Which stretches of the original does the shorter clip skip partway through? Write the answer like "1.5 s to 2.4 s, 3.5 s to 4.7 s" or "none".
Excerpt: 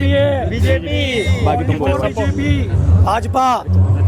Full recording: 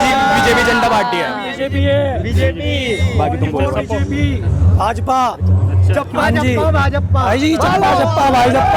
none